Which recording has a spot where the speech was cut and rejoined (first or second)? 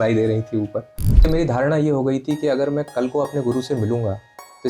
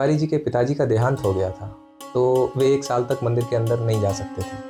first